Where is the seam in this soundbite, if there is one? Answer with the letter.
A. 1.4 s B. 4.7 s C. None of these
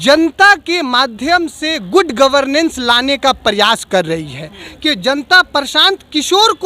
B